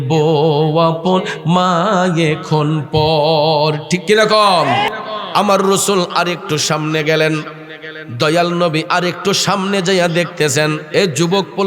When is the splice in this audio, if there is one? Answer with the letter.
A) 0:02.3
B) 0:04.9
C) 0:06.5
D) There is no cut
B